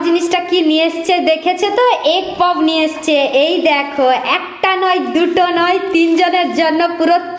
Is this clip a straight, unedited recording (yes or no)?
yes